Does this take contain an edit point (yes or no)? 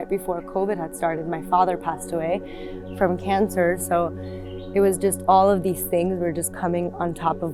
no